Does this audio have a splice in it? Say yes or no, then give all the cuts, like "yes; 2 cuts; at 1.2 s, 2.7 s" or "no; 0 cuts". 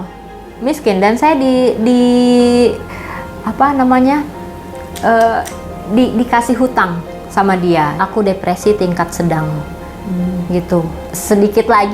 yes; 2 cuts; at 8.0 s, 11.0 s